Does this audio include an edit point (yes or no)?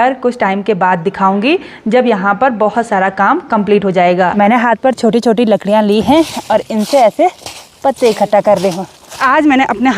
yes